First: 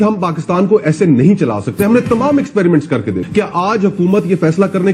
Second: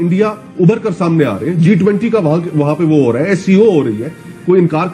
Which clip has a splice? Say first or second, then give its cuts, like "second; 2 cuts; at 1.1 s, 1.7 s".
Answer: first; 1 cut; at 3.2 s